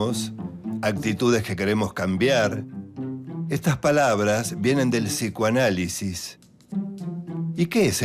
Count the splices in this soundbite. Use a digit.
1